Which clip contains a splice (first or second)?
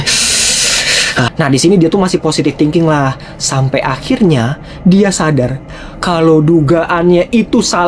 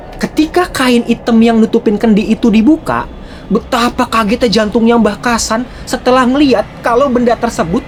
first